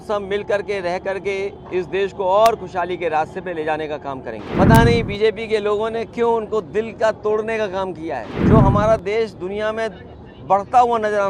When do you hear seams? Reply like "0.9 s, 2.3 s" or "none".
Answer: 4.4 s, 8.3 s